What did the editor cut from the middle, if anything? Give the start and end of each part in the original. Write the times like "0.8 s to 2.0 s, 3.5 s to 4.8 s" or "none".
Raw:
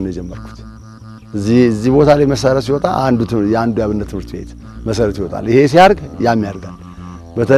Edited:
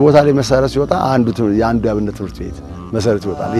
none